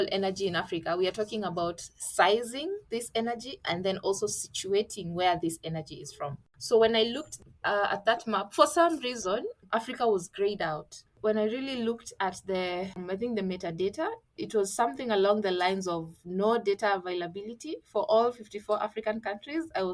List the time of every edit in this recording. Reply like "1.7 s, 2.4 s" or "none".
6.4 s, 9.6 s, 11.2 s, 13.0 s, 14.3 s